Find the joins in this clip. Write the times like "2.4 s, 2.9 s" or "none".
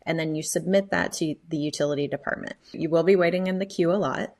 2.7 s